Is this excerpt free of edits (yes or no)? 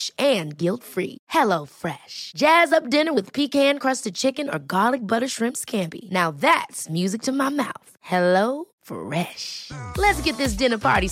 yes